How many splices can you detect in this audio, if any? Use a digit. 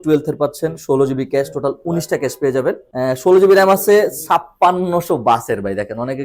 1